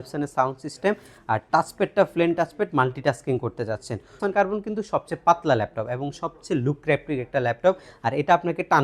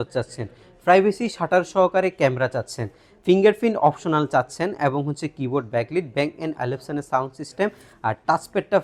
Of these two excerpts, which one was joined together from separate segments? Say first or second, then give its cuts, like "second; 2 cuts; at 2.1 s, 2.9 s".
first; 1 cut; at 4.2 s